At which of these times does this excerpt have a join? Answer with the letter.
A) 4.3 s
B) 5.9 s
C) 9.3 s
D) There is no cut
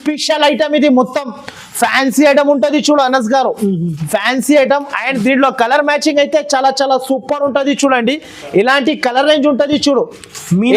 D